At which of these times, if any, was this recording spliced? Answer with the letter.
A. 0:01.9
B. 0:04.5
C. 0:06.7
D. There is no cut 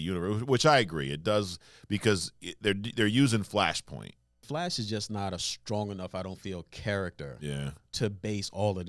B